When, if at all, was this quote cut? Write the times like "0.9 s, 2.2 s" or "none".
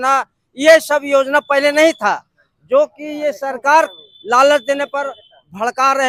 none